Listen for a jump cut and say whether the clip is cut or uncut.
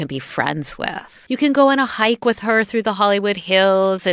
cut